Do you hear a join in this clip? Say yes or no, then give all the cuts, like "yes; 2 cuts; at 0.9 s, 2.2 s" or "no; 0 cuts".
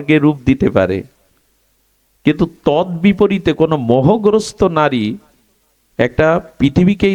no; 0 cuts